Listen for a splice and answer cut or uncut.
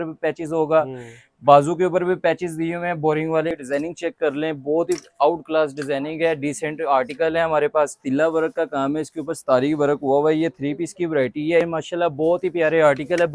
cut